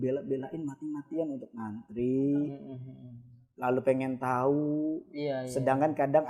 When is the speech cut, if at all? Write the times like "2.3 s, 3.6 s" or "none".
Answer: none

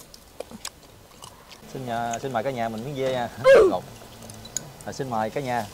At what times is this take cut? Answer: 1.6 s

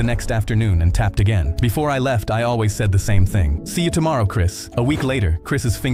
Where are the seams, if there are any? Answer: none

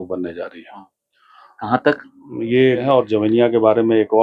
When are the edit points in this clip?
2.8 s

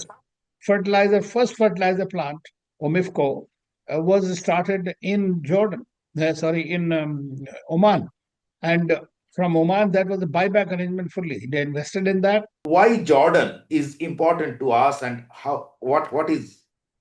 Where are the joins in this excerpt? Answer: 12.5 s

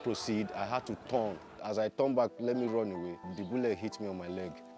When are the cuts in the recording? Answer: 1.5 s

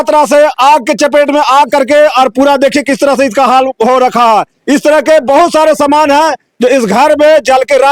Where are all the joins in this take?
none

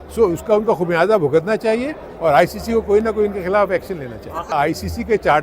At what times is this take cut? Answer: 4.5 s

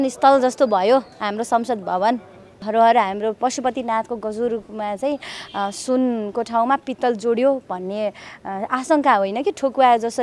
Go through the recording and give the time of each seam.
2.5 s

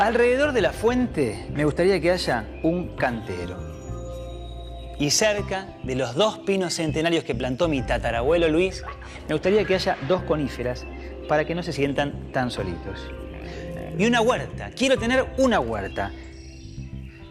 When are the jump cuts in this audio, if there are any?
none

